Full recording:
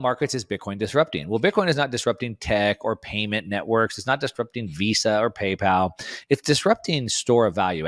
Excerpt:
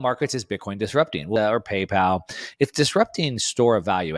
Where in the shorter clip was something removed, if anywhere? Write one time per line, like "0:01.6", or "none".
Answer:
0:01.4